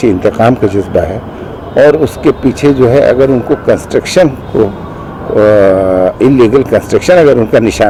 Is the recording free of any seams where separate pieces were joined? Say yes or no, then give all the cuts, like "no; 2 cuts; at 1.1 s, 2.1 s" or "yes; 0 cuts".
yes; 0 cuts